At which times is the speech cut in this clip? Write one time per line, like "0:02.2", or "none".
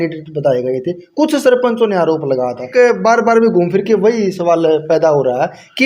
0:02.6